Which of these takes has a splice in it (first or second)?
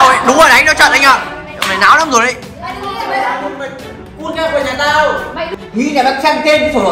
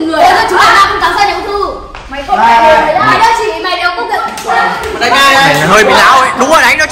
first